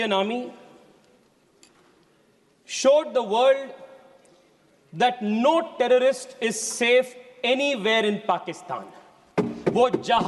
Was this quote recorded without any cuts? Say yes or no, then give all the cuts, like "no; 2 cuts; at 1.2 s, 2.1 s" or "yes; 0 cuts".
yes; 0 cuts